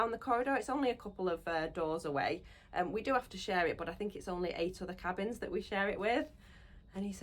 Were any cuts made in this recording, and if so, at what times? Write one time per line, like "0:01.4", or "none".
none